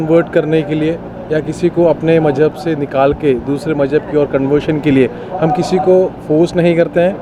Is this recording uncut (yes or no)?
yes